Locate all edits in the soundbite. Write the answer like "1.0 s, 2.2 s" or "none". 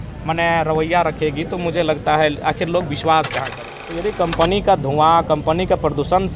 4.1 s